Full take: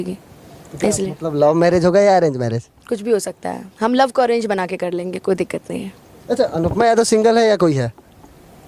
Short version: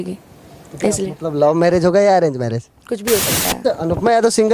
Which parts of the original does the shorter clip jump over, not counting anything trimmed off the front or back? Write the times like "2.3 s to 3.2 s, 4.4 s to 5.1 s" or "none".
3.6 s to 6.4 s